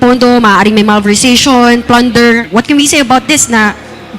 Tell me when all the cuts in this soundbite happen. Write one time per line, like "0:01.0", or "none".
0:02.4